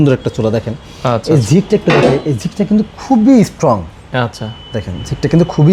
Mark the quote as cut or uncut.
uncut